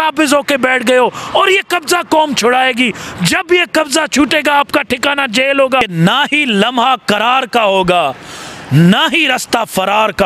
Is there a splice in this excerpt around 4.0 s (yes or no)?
no